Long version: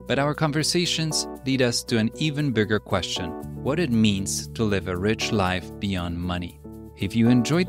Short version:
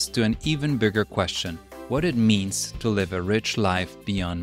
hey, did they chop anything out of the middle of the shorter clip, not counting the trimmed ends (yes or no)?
no